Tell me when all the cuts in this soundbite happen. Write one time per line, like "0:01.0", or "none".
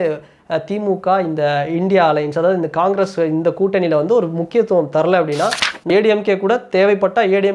0:05.9